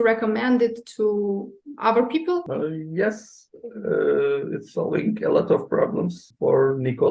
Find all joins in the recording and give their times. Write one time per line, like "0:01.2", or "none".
0:02.5
0:06.2